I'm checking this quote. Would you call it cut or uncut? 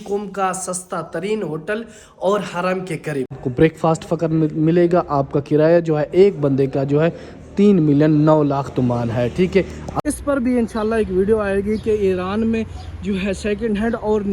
cut